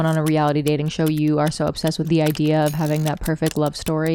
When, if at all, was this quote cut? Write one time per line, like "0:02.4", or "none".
0:02.0